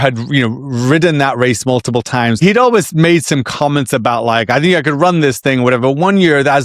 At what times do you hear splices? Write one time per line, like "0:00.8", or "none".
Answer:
0:02.4